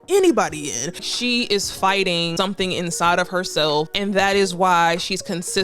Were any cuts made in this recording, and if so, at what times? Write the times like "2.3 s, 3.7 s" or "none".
1.1 s, 2.3 s, 3.9 s